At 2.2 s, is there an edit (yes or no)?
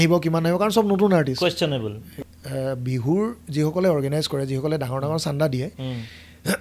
yes